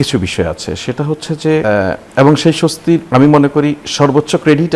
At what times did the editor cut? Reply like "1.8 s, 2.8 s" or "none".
1.6 s, 3.1 s